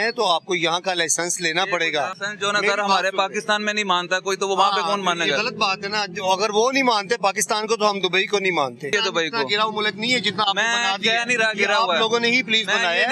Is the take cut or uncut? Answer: cut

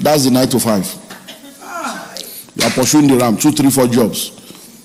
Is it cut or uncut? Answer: uncut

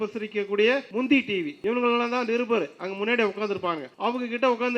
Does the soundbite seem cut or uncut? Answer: cut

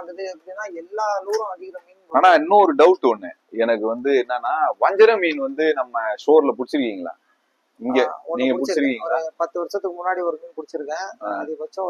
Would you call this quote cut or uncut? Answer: uncut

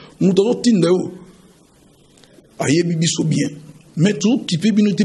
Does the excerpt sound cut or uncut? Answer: uncut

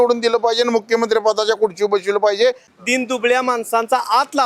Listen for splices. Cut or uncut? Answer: cut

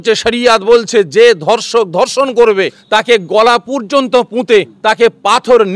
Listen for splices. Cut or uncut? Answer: cut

